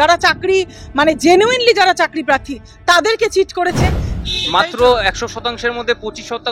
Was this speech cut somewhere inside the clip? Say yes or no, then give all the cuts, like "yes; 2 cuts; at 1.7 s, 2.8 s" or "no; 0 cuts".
yes; 1 cut; at 4.2 s